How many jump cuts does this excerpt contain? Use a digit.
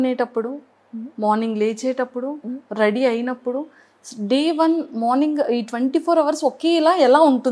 0